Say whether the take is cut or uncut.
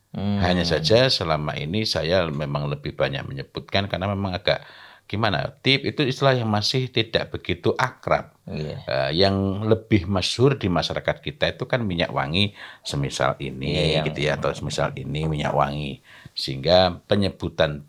uncut